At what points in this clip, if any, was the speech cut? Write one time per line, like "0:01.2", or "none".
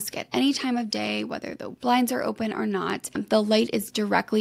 0:01.7